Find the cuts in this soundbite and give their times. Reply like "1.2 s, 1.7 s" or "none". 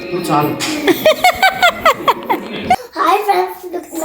2.9 s

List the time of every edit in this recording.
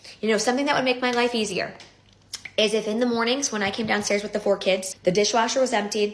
4.9 s

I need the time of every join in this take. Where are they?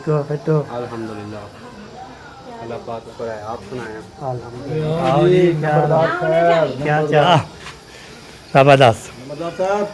3.0 s, 7.3 s

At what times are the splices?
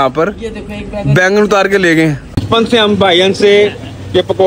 2.4 s

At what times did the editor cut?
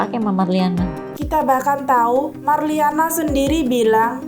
1.1 s

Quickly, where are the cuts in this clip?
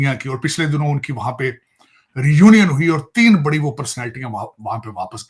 none

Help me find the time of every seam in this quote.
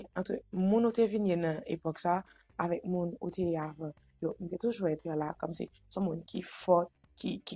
none

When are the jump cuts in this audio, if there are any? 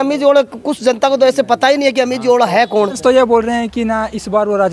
3.0 s

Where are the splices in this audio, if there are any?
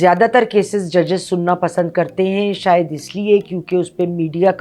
none

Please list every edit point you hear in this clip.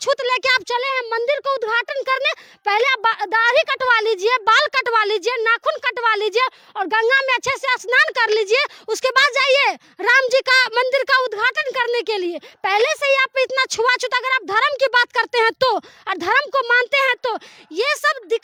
none

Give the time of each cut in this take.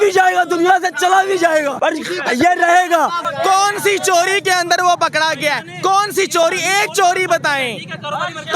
1.7 s, 3.3 s

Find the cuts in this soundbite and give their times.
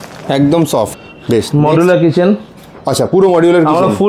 1.1 s

